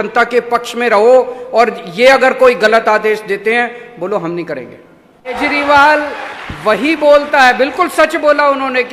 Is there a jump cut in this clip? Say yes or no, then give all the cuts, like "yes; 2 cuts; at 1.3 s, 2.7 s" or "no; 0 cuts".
yes; 1 cut; at 5.4 s